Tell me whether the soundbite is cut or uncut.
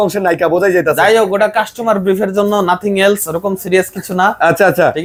uncut